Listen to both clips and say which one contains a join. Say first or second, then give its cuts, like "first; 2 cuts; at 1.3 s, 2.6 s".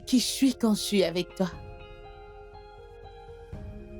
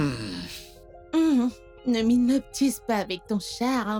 first; 1 cut; at 1.5 s